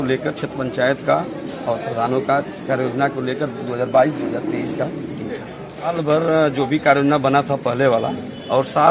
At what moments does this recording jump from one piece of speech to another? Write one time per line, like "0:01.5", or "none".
0:05.9